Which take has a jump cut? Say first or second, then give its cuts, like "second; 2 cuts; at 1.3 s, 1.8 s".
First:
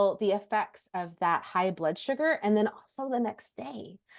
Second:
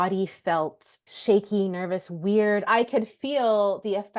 second; 2 cuts; at 1.1 s, 2.7 s